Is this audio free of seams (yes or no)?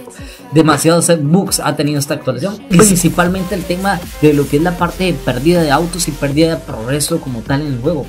no